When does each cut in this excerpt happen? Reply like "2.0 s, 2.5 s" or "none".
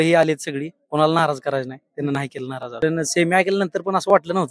2.8 s